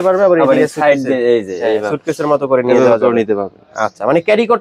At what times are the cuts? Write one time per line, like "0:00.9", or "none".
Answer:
none